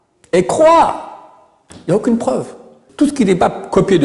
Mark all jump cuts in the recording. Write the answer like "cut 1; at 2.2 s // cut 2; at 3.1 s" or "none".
cut 1; at 2.9 s